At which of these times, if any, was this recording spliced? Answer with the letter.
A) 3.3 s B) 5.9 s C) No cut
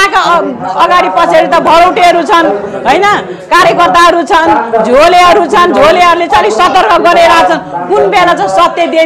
C